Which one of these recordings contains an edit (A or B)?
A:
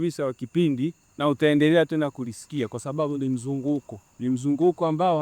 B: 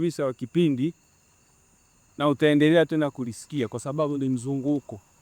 A